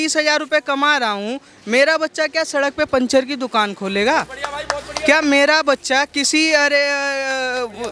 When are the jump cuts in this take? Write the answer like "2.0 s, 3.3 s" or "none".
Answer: none